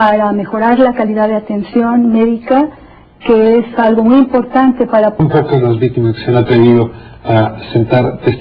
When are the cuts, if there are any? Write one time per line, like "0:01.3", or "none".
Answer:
none